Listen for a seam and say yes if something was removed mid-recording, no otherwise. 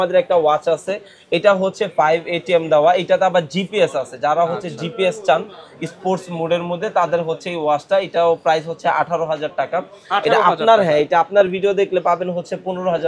no